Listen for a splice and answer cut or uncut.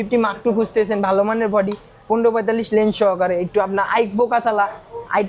uncut